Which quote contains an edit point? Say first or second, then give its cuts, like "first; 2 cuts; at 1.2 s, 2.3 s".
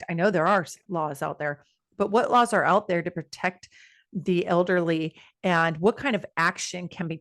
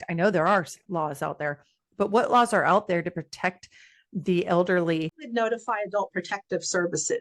second; 1 cut; at 5.2 s